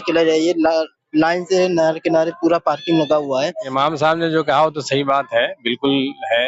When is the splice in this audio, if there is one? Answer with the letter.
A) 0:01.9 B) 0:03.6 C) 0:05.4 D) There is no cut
B